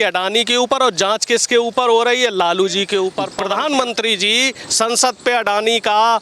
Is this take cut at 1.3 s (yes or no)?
no